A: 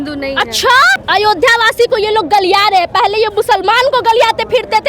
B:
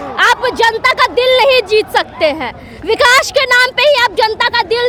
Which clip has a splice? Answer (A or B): A